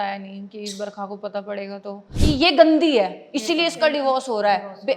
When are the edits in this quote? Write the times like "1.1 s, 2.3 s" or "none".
2.0 s